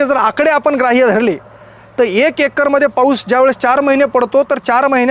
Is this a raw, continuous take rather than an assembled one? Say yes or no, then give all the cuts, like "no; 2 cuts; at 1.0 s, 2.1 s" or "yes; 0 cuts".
yes; 0 cuts